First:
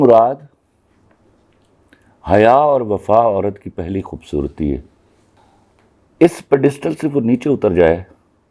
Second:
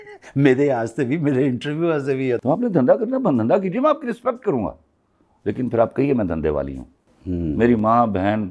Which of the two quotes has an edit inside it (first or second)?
second